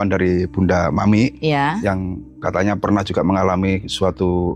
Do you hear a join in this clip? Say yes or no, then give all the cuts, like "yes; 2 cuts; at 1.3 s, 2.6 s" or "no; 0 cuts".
no; 0 cuts